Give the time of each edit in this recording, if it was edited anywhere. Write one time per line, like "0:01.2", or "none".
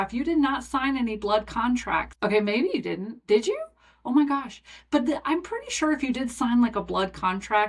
0:02.1